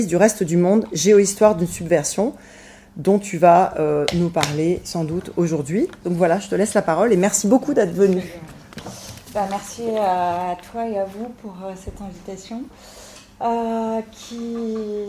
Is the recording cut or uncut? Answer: uncut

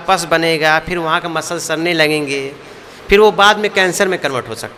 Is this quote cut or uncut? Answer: uncut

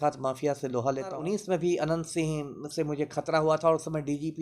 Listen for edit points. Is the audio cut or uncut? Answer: cut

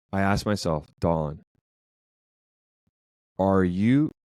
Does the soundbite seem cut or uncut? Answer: uncut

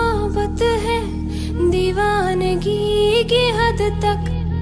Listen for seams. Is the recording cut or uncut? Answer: uncut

